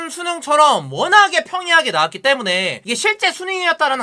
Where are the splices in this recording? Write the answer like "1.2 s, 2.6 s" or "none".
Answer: 2.8 s